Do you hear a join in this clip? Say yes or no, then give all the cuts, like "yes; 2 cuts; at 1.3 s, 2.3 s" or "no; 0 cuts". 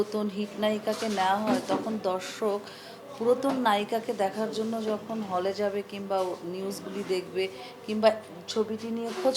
no; 0 cuts